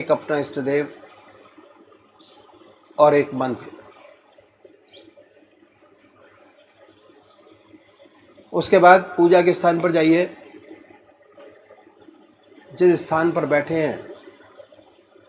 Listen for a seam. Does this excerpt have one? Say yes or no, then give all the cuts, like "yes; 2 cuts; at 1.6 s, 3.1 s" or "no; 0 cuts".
yes; 1 cut; at 7.7 s